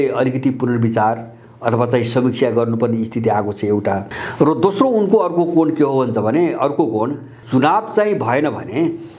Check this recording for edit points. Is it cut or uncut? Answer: cut